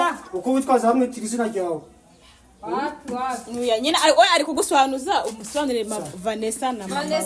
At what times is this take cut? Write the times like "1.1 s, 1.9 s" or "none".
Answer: none